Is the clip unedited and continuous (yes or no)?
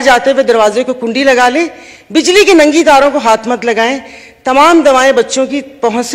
yes